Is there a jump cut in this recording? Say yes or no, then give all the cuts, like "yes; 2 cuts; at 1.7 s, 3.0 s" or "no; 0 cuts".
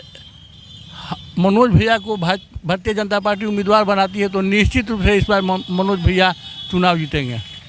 no; 0 cuts